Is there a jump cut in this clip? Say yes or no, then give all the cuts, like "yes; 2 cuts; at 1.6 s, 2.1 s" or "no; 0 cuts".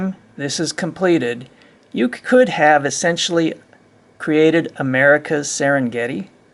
no; 0 cuts